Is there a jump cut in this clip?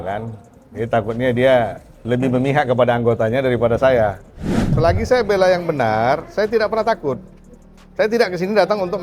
yes; 1 cut; at 4.7 s

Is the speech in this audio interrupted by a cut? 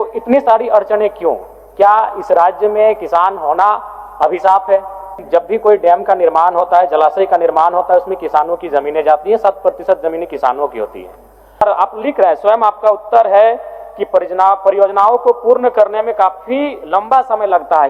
yes; 2 cuts; at 5.1 s, 11.6 s

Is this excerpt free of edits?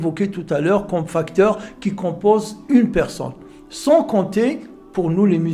yes; 0 cuts

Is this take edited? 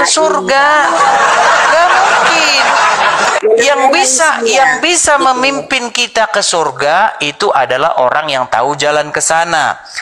yes; 1 cut; at 3.2 s

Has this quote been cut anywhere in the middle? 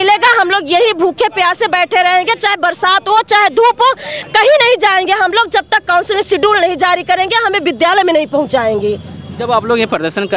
no; 0 cuts

